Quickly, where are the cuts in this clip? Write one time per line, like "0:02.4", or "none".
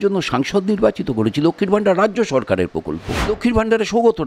0:03.3